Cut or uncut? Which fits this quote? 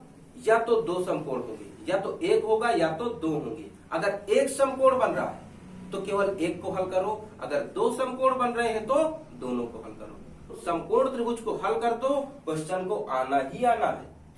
cut